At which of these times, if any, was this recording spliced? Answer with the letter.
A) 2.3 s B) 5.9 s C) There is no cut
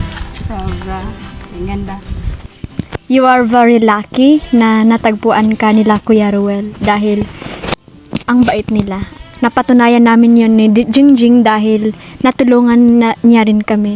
A